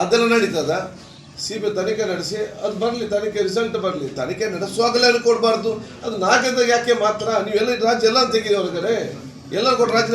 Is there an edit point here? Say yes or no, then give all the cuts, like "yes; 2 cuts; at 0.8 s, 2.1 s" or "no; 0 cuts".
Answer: yes; 1 cut; at 1.3 s